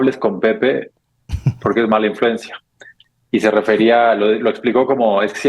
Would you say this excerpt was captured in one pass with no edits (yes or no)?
yes